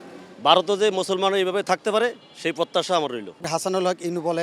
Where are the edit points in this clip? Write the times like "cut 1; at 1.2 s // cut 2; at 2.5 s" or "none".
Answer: cut 1; at 3.4 s